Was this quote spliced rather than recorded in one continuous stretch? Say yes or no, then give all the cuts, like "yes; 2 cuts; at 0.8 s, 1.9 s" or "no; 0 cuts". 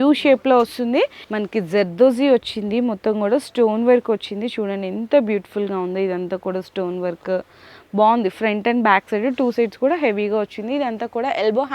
yes; 1 cut; at 1.2 s